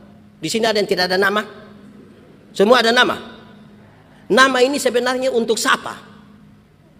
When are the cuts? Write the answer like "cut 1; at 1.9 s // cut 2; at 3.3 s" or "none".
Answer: none